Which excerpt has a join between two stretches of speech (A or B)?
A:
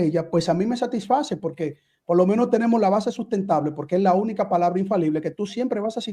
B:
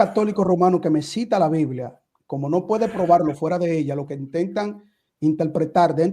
B